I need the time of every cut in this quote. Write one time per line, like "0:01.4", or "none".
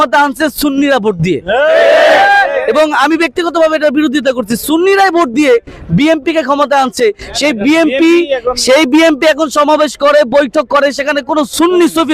none

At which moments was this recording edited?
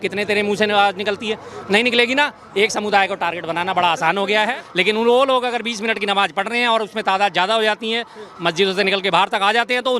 0:04.4

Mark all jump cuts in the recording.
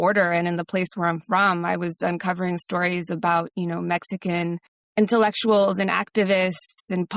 0:04.7

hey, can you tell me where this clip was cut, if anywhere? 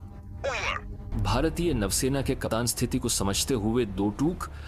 none

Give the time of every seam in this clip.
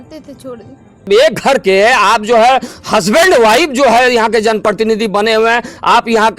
0:01.1

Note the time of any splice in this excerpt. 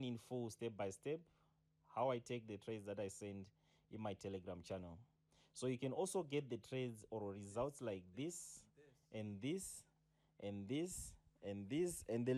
none

